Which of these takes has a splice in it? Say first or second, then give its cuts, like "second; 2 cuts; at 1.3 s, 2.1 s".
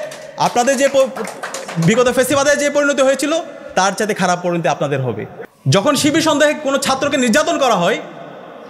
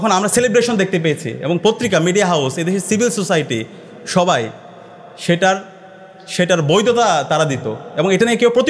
first; 1 cut; at 5.3 s